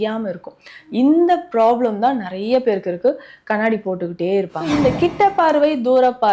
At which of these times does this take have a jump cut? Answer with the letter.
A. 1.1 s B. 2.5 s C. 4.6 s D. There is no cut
C